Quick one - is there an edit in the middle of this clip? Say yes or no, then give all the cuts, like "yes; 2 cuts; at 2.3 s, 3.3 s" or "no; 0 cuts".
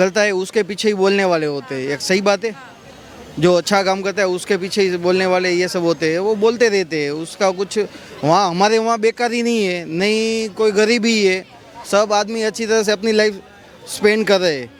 no; 0 cuts